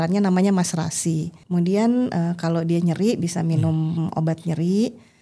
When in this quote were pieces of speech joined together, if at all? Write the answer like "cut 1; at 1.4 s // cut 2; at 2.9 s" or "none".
cut 1; at 1.3 s

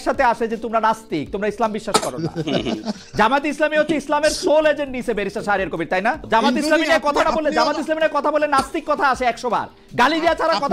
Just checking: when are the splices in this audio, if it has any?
cut 1; at 6.2 s

